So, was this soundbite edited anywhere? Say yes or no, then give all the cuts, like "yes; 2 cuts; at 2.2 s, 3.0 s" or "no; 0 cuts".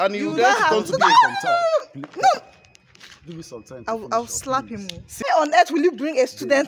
yes; 1 cut; at 5.2 s